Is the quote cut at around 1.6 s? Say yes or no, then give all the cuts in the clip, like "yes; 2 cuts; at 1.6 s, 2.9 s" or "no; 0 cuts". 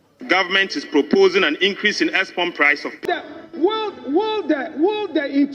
no; 1 cut; at 3.0 s